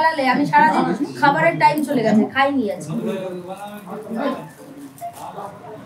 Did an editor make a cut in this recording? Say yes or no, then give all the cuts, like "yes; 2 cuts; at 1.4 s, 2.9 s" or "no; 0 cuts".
no; 0 cuts